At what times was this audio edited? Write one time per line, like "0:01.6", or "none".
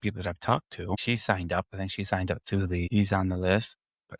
0:01.0
0:02.9